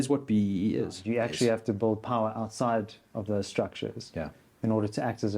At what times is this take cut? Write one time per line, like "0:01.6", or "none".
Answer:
0:01.0